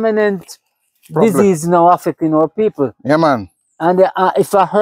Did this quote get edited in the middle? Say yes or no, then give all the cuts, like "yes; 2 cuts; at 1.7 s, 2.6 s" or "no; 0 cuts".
no; 0 cuts